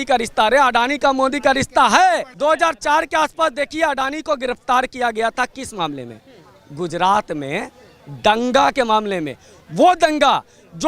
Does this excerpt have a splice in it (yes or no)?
no